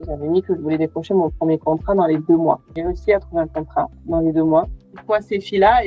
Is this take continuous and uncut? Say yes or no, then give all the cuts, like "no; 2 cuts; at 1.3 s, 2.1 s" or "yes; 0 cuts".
no; 2 cuts; at 2.7 s, 4.8 s